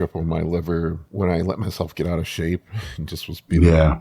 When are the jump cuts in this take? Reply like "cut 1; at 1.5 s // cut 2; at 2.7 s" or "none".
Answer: cut 1; at 1.0 s